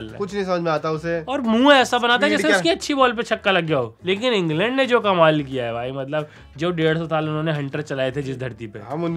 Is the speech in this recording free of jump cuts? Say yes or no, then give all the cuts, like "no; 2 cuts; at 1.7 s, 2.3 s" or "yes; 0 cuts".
no; 1 cut; at 3.9 s